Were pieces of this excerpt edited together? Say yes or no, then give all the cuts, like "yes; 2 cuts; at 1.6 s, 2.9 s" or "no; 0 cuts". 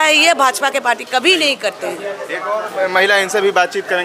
no; 0 cuts